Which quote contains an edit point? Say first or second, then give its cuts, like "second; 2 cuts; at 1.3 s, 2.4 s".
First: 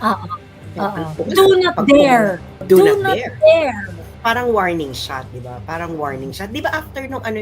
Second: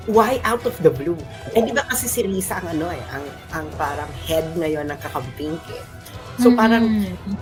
first; 3 cuts; at 1.1 s, 2.6 s, 4.1 s